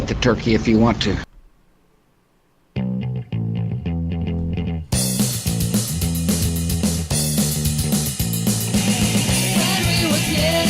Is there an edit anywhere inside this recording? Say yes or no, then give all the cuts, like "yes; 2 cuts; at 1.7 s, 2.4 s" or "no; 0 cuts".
yes; 1 cut; at 1.2 s